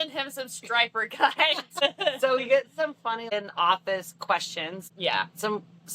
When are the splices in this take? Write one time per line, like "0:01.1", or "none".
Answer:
0:01.8
0:03.3
0:04.9